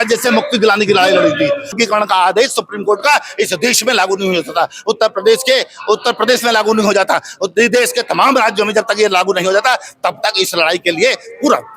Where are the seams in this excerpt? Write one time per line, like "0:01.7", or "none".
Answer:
0:01.8